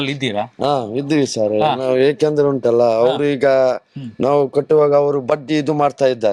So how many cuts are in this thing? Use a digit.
1